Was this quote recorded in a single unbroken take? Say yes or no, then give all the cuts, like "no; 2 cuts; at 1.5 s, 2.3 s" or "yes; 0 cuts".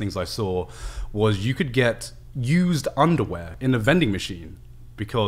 no; 1 cut; at 3.5 s